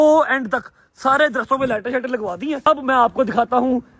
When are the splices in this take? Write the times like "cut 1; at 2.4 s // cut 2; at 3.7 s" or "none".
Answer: cut 1; at 2.6 s